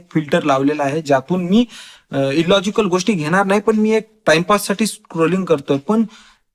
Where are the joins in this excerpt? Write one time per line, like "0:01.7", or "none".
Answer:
none